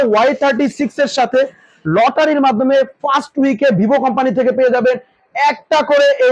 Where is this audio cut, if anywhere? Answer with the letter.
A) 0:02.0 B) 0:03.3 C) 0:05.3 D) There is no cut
D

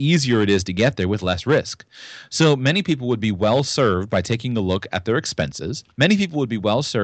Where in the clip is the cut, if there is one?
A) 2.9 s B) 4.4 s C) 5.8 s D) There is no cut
C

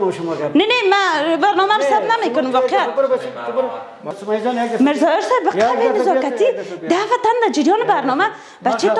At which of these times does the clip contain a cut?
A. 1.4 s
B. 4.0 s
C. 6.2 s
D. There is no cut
B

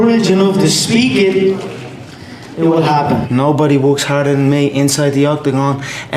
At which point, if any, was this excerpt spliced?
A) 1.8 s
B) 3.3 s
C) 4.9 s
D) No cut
B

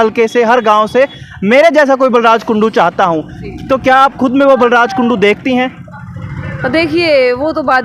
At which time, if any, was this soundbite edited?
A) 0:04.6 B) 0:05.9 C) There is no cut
C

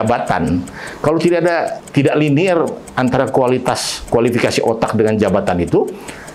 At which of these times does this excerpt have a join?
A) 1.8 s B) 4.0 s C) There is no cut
A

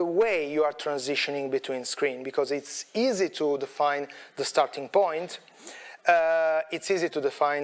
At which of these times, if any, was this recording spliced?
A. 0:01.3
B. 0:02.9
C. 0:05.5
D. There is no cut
D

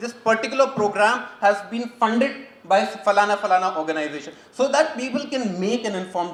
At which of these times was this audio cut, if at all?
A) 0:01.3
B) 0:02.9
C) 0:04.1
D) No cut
D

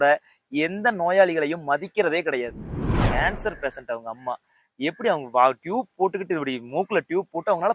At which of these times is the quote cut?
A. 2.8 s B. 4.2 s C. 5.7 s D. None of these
A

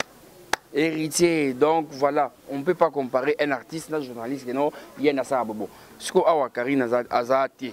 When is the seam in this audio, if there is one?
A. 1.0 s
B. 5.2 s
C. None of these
C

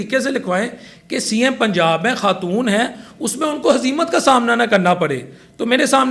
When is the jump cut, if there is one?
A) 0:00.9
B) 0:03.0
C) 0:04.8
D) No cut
D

